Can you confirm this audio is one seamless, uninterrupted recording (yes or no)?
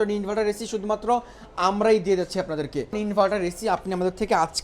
no